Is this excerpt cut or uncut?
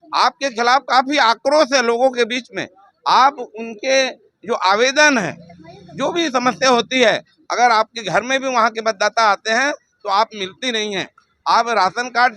uncut